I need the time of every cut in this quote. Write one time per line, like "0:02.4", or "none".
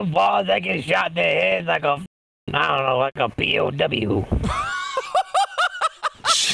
none